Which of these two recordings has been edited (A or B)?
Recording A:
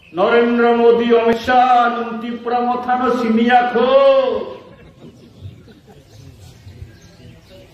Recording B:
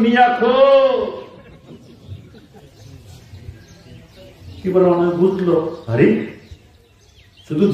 A